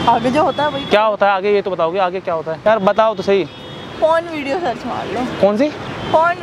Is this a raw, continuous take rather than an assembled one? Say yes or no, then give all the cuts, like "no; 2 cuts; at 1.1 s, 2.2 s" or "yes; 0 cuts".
no; 1 cut; at 2.6 s